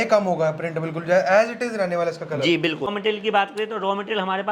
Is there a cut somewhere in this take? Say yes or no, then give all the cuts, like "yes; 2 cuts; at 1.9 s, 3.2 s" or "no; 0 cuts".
yes; 1 cut; at 2.9 s